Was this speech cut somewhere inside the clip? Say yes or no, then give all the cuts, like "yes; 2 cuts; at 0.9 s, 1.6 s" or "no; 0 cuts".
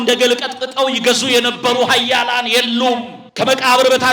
yes; 1 cut; at 3.2 s